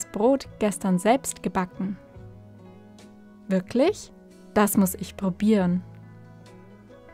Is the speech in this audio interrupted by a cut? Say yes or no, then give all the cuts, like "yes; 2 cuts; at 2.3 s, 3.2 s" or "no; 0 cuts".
yes; 3 cuts; at 2.0 s, 3.5 s, 5.8 s